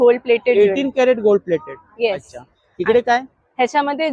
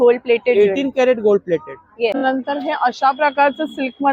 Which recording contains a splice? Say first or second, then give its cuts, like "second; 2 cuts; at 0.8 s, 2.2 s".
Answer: second; 1 cut; at 2.2 s